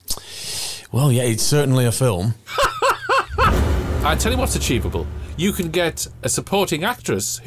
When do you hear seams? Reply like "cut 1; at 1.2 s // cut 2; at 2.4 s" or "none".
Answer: cut 1; at 3.6 s